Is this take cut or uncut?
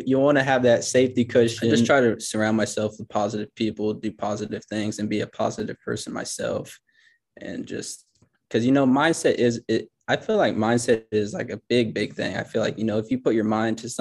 cut